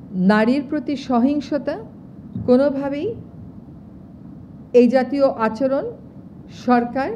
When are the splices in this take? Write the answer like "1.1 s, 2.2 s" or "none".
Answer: none